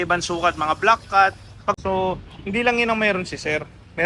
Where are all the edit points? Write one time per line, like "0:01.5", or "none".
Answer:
0:01.8